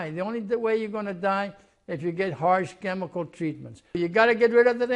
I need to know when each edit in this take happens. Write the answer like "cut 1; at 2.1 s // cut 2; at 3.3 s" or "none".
cut 1; at 4.0 s